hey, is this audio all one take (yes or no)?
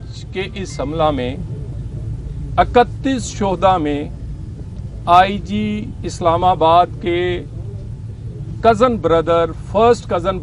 yes